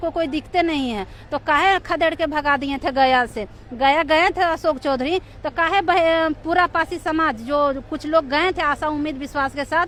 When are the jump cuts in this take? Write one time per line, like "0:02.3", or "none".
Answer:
none